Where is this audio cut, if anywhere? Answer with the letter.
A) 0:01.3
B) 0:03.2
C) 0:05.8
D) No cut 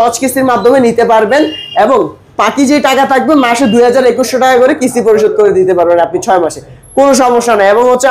D